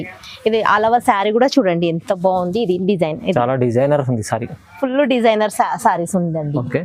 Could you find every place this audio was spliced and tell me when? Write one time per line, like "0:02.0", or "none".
none